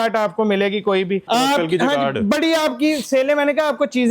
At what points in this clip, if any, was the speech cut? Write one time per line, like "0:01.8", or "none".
0:01.3